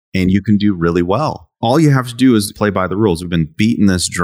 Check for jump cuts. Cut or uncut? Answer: cut